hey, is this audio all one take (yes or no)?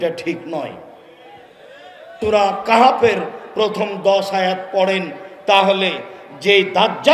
no